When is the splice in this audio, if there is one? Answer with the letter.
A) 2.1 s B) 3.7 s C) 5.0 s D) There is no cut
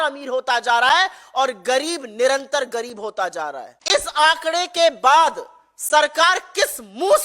B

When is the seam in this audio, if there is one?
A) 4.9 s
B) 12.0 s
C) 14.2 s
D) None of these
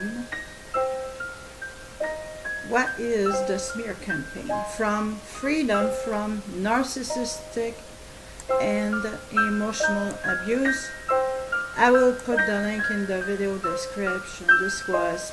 A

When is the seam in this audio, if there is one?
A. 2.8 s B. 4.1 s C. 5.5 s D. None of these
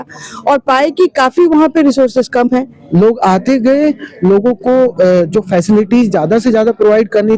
A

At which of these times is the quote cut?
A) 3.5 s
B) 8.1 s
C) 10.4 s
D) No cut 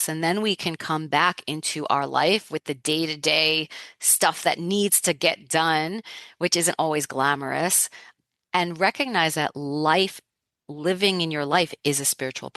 B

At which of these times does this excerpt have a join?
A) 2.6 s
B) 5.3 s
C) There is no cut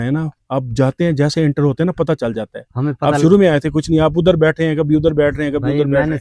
C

